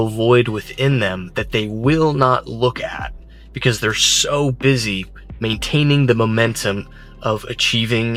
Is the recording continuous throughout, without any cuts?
yes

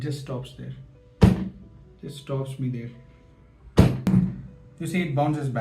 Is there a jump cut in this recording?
yes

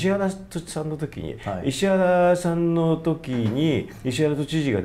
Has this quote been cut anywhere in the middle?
no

